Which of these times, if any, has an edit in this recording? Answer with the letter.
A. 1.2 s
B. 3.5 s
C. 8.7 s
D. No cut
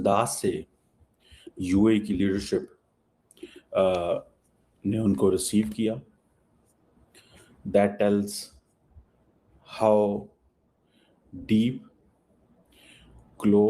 D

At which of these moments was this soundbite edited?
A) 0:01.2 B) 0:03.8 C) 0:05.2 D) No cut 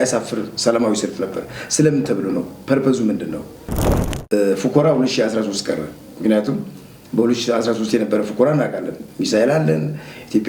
B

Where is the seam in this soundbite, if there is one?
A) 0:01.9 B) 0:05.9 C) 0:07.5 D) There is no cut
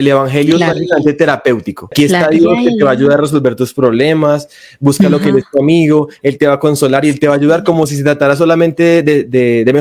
A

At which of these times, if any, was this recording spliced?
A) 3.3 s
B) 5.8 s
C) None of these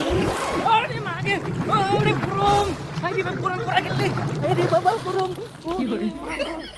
B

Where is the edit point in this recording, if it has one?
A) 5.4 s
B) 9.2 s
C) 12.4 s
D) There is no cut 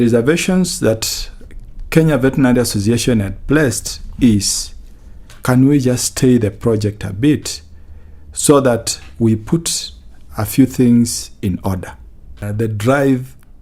C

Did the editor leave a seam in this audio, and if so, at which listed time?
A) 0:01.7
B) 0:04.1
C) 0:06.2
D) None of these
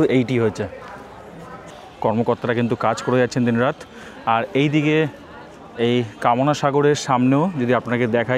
A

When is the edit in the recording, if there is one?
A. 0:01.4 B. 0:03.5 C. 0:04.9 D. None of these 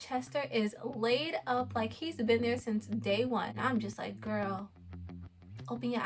B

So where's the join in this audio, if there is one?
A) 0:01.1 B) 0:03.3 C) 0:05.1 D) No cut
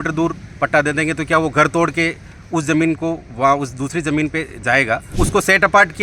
C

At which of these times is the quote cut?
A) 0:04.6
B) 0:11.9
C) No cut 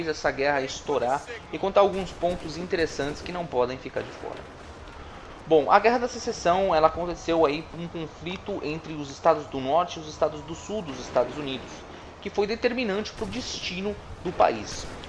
A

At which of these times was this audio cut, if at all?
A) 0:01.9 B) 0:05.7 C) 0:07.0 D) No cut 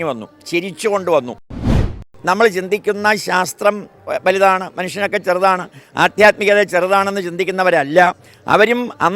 A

